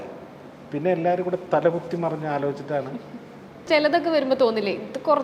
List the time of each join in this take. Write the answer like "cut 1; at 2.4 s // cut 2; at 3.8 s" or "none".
cut 1; at 3.7 s